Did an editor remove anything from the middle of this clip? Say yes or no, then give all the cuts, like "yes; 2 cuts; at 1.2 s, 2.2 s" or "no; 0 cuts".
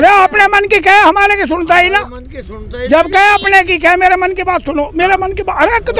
no; 0 cuts